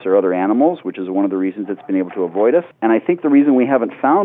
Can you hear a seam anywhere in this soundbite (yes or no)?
yes